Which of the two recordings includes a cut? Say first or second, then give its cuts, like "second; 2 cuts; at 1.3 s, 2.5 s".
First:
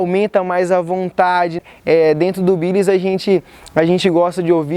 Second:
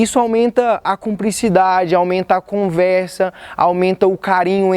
first; 1 cut; at 1.7 s